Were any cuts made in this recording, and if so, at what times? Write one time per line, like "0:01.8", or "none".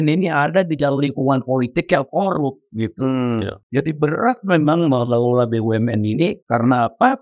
0:03.6
0:06.4